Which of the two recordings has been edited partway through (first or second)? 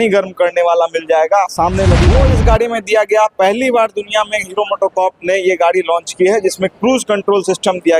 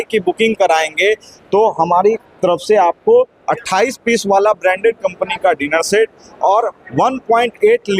first